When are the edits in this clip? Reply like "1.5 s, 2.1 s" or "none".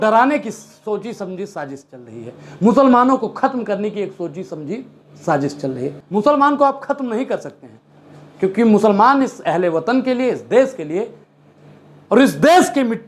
5.9 s

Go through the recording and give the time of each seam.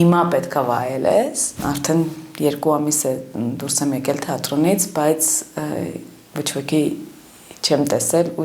1.5 s

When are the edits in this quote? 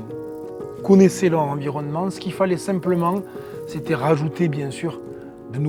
none

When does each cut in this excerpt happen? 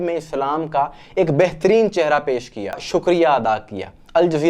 2.9 s

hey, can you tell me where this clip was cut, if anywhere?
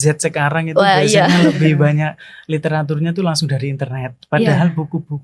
none

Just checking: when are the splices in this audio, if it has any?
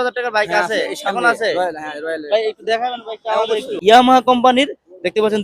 3.7 s

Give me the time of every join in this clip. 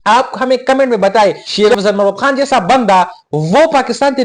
1.4 s

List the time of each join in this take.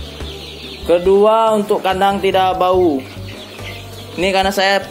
none

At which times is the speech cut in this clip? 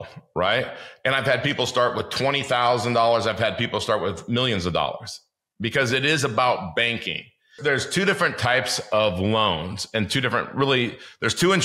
7.5 s

